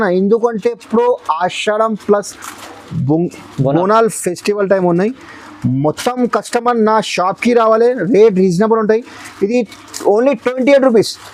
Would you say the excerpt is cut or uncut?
uncut